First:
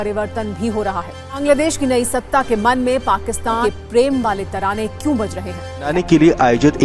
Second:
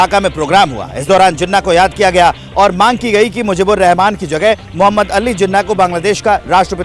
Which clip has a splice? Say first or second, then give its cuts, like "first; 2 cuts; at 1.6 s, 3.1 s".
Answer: first; 3 cuts; at 1.2 s, 3.6 s, 5.9 s